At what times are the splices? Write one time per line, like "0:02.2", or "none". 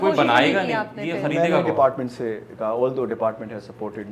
none